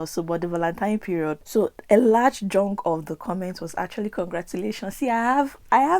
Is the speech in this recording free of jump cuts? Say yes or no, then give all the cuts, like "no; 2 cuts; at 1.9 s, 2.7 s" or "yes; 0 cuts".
no; 1 cut; at 1.4 s